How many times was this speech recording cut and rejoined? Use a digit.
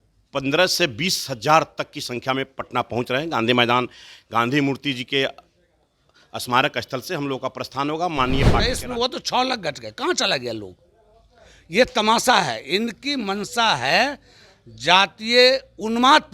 1